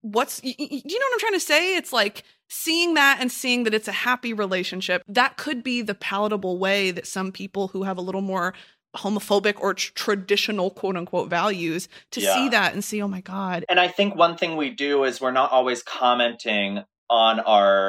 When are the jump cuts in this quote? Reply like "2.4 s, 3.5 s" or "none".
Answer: 5.0 s, 13.6 s